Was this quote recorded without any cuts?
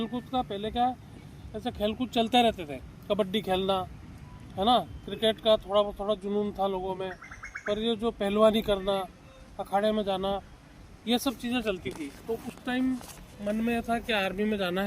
yes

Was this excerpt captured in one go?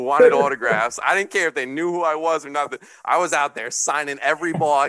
yes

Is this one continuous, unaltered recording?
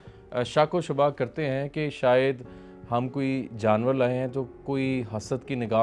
yes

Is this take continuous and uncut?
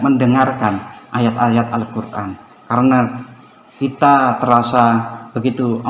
yes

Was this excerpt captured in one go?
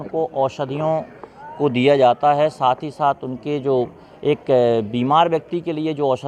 yes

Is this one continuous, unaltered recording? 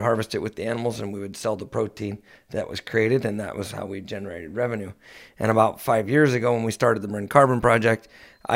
yes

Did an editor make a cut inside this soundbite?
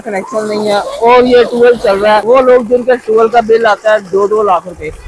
yes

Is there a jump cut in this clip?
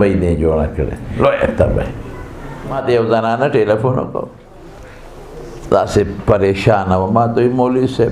yes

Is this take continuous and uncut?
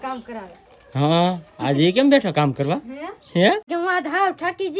no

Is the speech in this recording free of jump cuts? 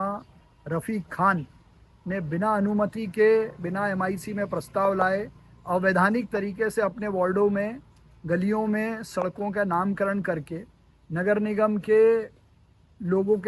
yes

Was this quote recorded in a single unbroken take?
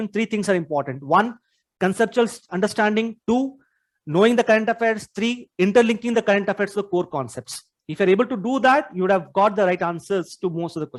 yes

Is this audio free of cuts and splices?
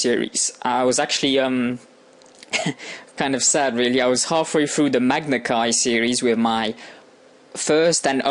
yes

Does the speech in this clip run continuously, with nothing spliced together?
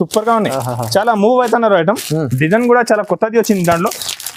yes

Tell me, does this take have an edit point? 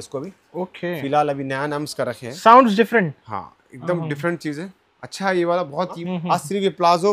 yes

